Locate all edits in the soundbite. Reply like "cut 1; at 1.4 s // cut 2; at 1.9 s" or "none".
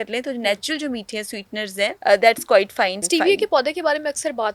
cut 1; at 2.0 s // cut 2; at 3.0 s